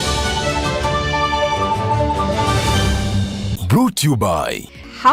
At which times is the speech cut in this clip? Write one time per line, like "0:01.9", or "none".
none

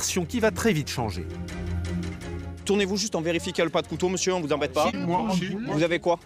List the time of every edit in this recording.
none

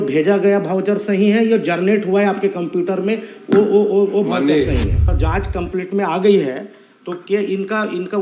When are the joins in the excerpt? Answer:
0:05.1

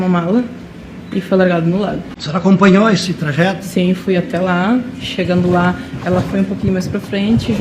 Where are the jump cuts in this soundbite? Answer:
0:02.1

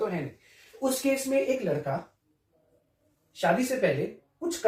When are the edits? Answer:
none

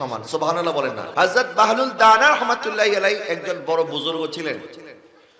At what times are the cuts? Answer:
0:01.0

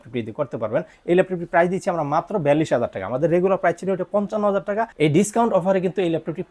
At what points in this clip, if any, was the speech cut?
0:00.9

